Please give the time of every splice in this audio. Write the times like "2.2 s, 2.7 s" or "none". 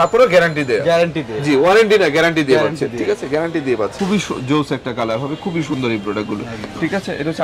3.9 s